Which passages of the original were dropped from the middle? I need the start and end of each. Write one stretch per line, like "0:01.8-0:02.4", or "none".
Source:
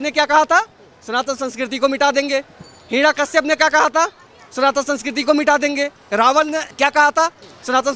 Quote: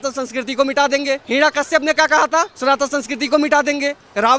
0:02.5-0:02.9
0:04.2-0:04.5